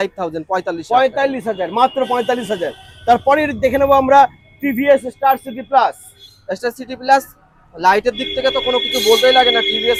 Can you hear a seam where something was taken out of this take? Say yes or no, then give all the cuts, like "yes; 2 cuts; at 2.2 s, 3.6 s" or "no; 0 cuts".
no; 0 cuts